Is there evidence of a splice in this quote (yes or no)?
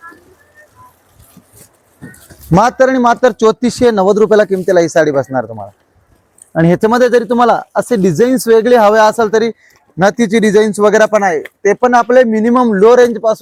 no